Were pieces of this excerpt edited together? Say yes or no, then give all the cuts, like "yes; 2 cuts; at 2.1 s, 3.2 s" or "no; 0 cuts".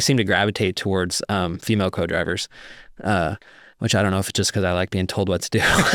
no; 0 cuts